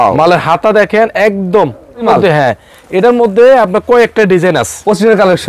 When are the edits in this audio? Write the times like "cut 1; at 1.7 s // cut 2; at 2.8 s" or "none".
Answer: cut 1; at 2.0 s